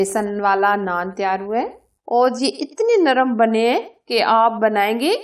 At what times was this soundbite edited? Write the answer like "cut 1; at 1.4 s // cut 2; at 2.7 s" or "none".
cut 1; at 1.9 s

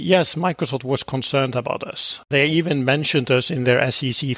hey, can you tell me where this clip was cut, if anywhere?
cut 1; at 2.3 s

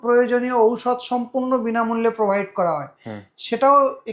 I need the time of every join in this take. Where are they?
none

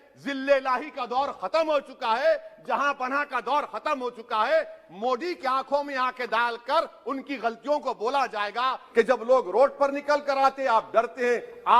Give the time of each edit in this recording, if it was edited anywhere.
cut 1; at 8.8 s

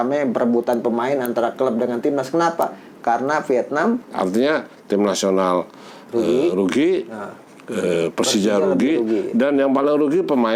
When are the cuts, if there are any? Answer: cut 1; at 4.0 s

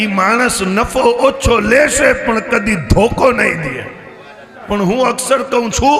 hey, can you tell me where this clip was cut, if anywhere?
cut 1; at 4.5 s

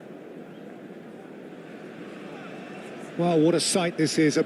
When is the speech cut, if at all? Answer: cut 1; at 3.2 s

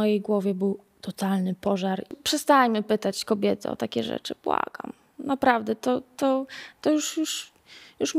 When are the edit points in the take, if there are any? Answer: cut 1; at 2.1 s

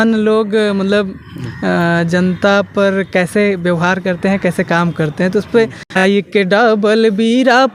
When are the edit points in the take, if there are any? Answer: cut 1; at 6.0 s

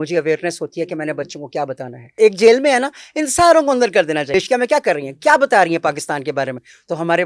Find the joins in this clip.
cut 1; at 2.1 s // cut 2; at 4.3 s

